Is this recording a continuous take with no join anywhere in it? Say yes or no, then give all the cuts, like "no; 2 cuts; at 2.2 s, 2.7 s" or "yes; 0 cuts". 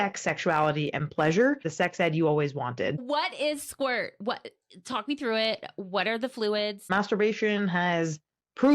no; 3 cuts; at 1.7 s, 3.0 s, 6.9 s